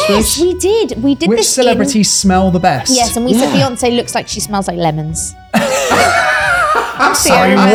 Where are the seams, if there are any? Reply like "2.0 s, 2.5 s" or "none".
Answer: none